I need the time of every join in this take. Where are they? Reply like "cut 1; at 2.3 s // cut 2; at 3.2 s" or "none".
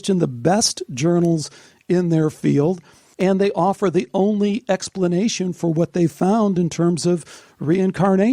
cut 1; at 3.0 s